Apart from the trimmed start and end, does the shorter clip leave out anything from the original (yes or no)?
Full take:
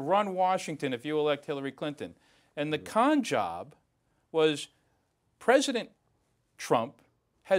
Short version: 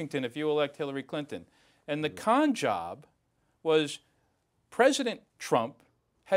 yes